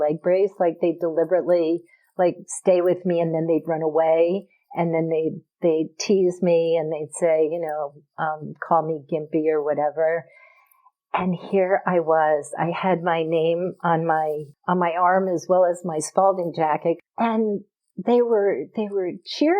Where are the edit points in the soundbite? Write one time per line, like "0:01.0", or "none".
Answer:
0:14.5
0:17.0